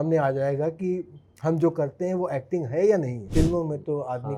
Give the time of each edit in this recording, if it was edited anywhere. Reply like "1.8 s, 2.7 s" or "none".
3.3 s